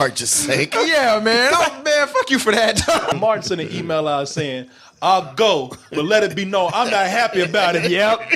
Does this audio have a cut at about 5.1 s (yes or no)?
no